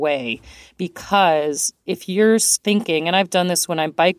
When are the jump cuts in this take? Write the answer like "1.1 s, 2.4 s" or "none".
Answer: 1.7 s, 2.5 s